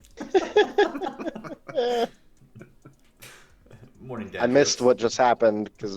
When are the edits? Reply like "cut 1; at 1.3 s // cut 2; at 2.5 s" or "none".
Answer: none